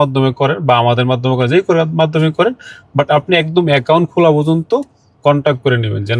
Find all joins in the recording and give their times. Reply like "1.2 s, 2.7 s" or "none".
none